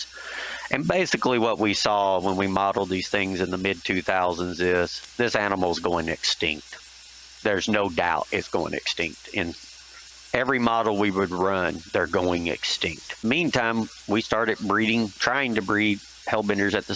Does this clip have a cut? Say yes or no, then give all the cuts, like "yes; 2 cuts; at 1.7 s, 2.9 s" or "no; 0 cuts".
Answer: yes; 1 cut; at 13.2 s